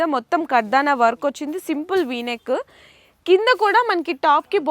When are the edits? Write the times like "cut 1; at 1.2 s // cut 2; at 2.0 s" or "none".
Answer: none